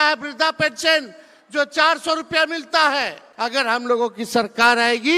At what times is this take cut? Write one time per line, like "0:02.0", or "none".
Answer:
0:03.7